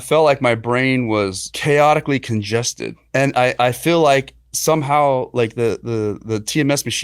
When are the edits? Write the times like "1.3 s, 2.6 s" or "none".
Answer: 1.5 s, 3.0 s